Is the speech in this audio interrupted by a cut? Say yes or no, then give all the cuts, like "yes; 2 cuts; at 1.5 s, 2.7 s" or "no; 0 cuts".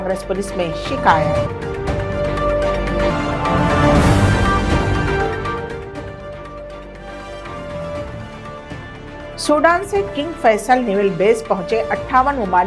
no; 0 cuts